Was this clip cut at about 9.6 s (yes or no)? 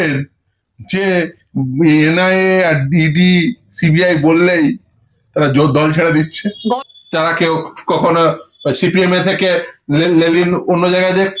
no